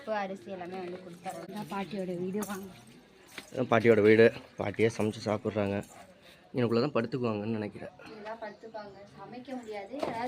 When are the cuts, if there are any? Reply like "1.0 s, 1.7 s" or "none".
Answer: 1.4 s